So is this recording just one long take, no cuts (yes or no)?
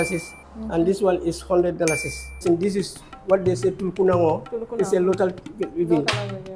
no